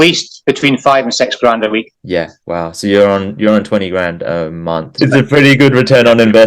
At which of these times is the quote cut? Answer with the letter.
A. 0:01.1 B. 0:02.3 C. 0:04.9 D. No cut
C